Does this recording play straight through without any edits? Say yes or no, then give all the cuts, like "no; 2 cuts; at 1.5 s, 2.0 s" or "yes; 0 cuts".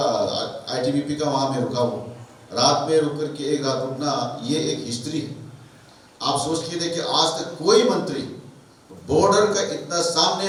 yes; 0 cuts